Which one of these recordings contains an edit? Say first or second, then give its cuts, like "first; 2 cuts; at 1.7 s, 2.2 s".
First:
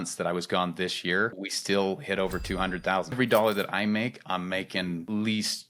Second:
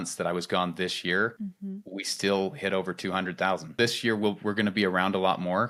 first; 2 cuts; at 1.4 s, 3.2 s